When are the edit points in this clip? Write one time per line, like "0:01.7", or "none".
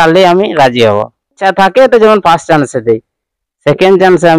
0:01.4